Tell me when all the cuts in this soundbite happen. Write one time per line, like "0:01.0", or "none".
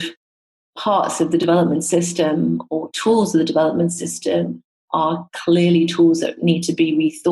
none